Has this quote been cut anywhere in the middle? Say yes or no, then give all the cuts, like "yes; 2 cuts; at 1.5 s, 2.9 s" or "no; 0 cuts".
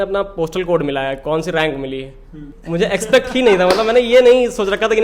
yes; 1 cut; at 2.5 s